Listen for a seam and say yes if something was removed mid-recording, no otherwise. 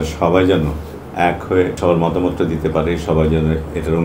yes